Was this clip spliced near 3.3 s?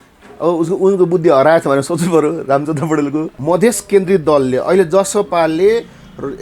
yes; 1 cut; at 3.3 s

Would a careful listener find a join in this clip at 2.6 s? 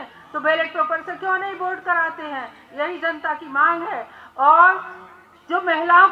no; 0 cuts

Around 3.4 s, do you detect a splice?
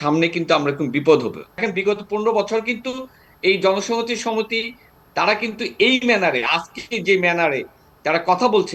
no; 1 cut; at 1.6 s

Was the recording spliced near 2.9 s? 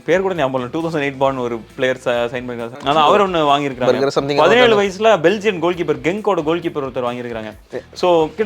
yes; 1 cut; at 2.9 s

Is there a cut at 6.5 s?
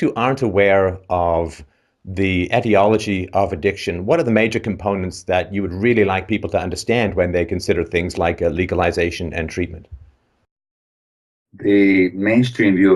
yes; 1 cut; at 6.5 s

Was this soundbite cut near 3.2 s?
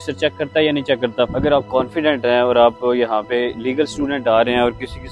no; 1 cut; at 1.3 s

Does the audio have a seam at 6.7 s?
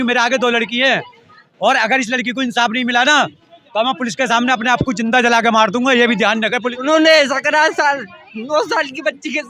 yes; 1 cut; at 6.7 s

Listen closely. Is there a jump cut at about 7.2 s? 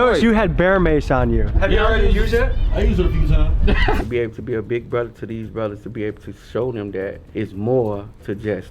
yes; 3 cuts; at 1.4 s, 4.0 s, 7.2 s

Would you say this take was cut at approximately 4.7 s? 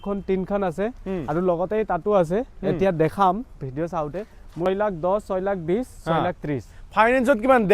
yes; 1 cut; at 4.7 s

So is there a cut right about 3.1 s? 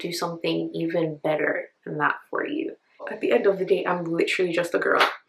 yes; 1 cut; at 3.1 s

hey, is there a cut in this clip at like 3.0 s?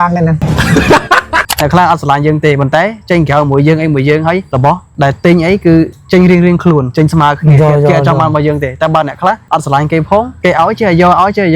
no; 1 cut; at 1.6 s

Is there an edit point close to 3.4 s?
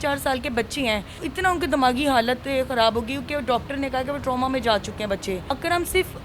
no; 1 cut; at 1.2 s

